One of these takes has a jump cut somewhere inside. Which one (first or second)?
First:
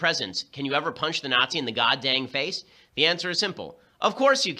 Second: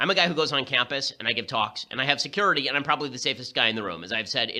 second